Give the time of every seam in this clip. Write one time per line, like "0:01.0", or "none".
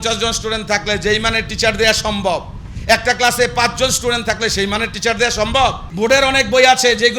0:05.8